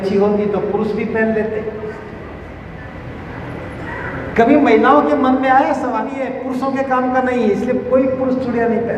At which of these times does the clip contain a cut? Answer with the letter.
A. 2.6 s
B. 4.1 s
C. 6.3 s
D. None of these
C